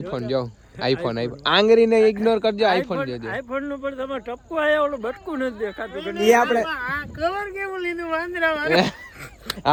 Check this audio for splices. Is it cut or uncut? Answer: uncut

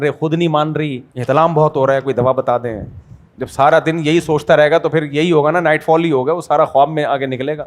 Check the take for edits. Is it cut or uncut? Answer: cut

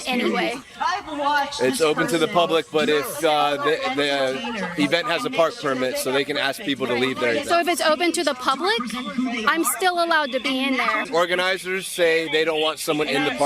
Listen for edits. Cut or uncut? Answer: cut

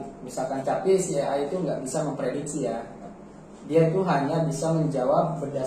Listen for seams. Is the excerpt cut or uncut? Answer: uncut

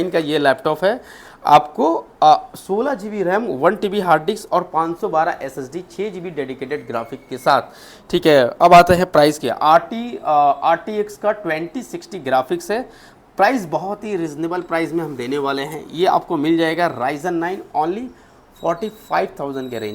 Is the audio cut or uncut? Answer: uncut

